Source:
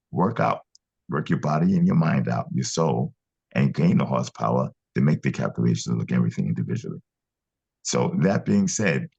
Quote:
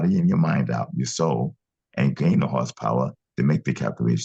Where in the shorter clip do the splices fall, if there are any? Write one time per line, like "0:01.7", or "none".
none